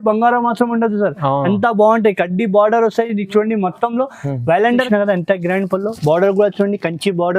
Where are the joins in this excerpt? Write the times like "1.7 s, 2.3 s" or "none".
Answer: 4.9 s